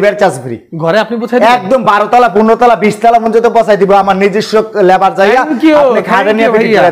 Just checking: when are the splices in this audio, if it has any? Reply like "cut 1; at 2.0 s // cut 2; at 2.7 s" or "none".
none

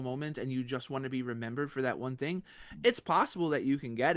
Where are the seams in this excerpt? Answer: none

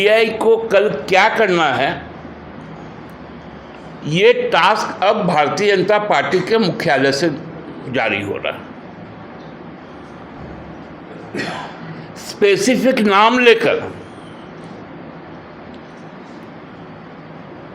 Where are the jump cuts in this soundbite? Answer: none

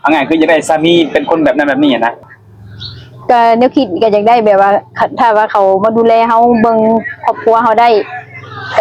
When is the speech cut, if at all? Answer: cut 1; at 2.2 s

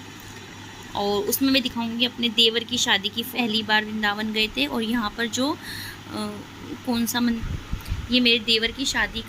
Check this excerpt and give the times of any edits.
cut 1; at 3.3 s // cut 2; at 7.4 s

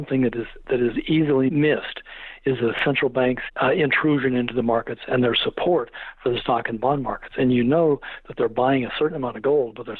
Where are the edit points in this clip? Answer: cut 1; at 1.5 s // cut 2; at 3.5 s

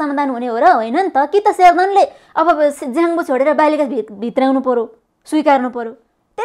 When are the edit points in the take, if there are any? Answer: none

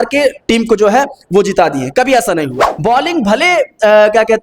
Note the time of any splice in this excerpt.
cut 1; at 2.6 s

